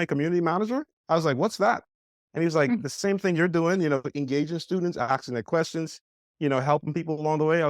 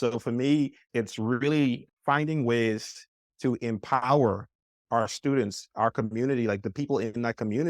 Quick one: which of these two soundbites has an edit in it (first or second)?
second